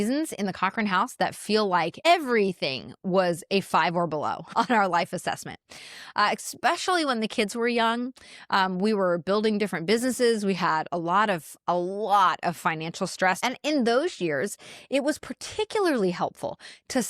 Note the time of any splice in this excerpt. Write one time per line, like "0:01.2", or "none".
0:02.1
0:04.5
0:13.4